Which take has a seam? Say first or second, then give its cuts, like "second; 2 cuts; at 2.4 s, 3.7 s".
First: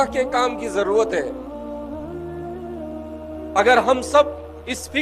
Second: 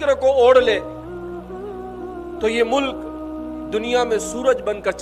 first; 2 cuts; at 1.3 s, 3.5 s